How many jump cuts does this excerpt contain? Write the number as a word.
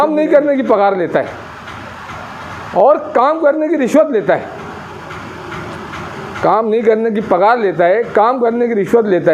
zero